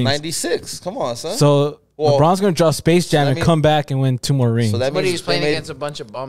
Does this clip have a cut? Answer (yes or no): no